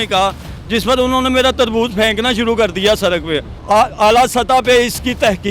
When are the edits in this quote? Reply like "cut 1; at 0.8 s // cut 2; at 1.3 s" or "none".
cut 1; at 3.5 s